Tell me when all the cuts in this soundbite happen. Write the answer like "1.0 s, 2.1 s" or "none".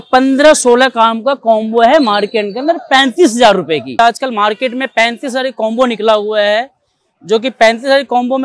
4.0 s